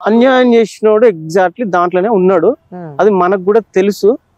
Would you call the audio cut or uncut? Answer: uncut